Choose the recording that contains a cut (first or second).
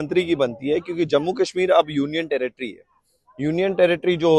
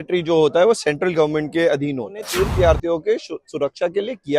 second